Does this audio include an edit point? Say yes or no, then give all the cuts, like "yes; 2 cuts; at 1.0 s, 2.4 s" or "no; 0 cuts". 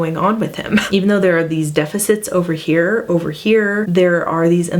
yes; 2 cuts; at 0.9 s, 3.9 s